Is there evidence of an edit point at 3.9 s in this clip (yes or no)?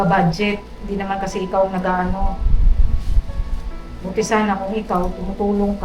yes